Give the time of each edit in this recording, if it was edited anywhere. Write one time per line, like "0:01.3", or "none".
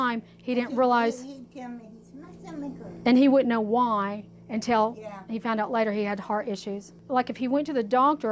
0:07.0